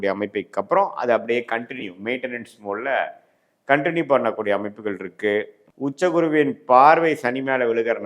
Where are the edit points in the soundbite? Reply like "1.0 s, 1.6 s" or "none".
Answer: 5.6 s

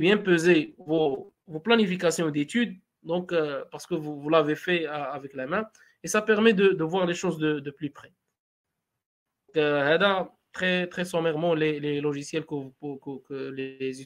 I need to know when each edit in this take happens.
none

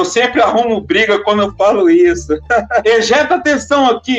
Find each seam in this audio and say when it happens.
2.8 s

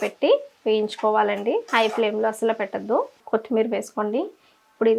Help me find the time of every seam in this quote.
3.2 s

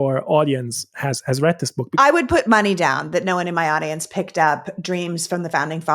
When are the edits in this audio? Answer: 1.9 s

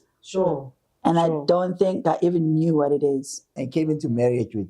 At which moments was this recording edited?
3.6 s

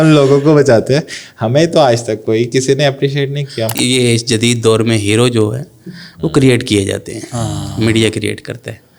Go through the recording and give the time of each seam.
3.8 s

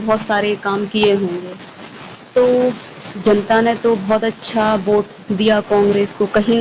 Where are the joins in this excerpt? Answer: none

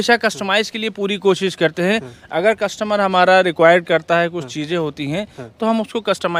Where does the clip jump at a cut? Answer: none

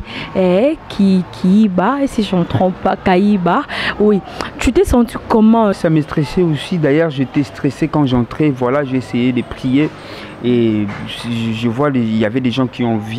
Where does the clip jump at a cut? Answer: 5.8 s

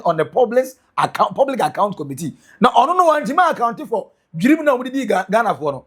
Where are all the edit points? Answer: none

